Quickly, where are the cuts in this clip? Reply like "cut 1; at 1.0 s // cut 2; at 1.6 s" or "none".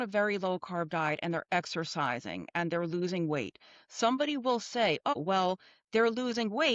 cut 1; at 5.1 s